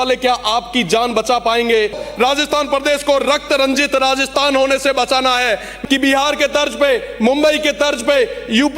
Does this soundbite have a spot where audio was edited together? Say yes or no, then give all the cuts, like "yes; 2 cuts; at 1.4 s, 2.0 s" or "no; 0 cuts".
yes; 2 cuts; at 2.0 s, 5.7 s